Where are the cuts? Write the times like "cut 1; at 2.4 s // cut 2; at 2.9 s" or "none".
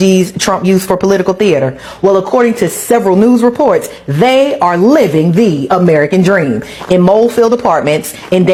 none